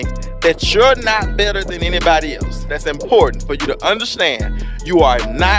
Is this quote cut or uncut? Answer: uncut